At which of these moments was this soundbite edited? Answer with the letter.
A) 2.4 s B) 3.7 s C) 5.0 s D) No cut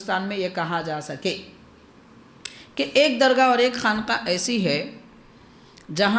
D